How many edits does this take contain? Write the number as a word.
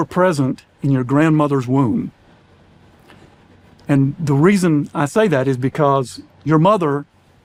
zero